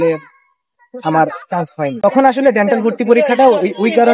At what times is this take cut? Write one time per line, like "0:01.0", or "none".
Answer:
0:02.0